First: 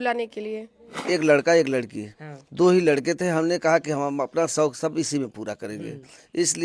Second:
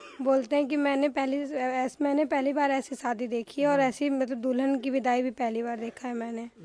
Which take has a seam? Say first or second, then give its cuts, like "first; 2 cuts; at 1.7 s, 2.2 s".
first; 1 cut; at 1.0 s